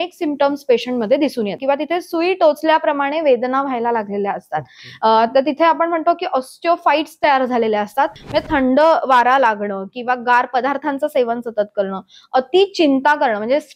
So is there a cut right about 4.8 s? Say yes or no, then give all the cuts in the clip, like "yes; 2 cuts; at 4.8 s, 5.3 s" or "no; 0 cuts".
no; 2 cuts; at 1.6 s, 8.2 s